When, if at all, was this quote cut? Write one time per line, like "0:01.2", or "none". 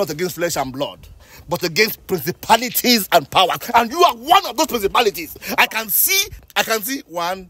none